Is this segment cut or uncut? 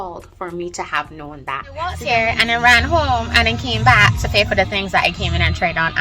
cut